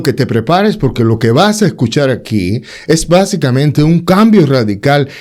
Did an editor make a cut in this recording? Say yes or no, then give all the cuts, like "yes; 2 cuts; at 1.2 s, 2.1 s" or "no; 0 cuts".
no; 0 cuts